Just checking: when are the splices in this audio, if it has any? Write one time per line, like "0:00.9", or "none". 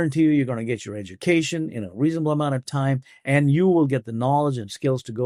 none